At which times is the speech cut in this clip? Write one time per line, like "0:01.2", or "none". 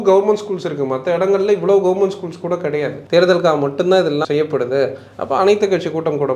0:03.0
0:04.2